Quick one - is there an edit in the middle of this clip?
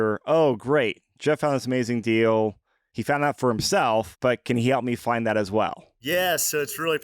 yes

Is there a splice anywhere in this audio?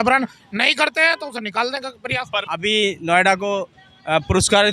yes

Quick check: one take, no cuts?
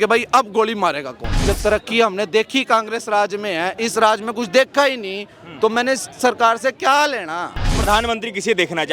no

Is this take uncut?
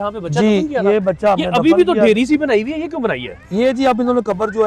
yes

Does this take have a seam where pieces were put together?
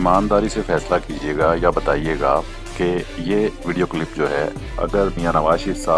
no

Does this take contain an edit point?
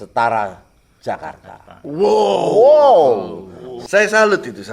yes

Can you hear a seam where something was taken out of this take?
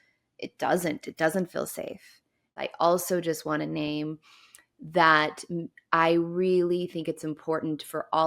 yes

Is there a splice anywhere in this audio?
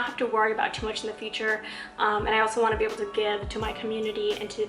no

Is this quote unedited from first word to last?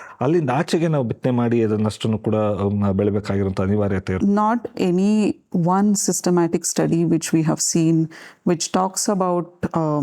no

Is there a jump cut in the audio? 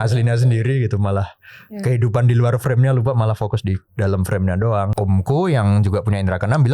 yes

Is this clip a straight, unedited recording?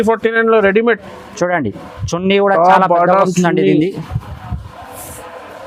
yes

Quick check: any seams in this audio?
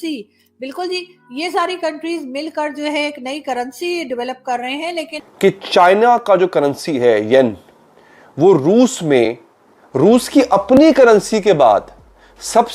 yes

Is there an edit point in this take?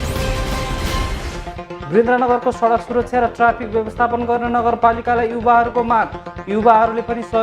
yes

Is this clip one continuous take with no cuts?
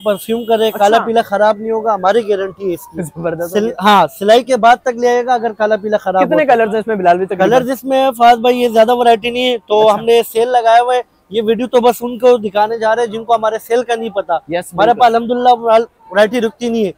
yes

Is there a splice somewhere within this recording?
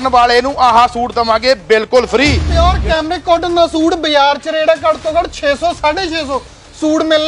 yes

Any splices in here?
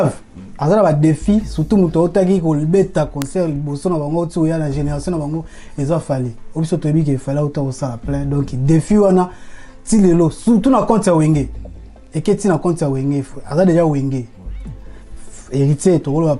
no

